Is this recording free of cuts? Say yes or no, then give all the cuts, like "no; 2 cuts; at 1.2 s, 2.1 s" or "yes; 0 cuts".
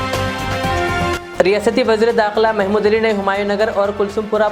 no; 1 cut; at 1.1 s